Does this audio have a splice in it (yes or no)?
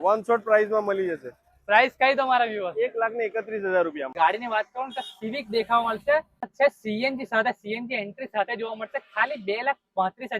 yes